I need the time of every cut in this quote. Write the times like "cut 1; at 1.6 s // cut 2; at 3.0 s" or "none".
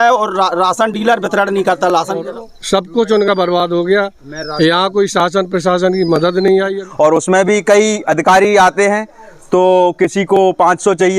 cut 1; at 2.2 s // cut 2; at 6.8 s